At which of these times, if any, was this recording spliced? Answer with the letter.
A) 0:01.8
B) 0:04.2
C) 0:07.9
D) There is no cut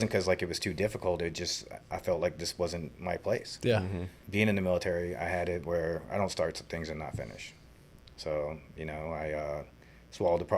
B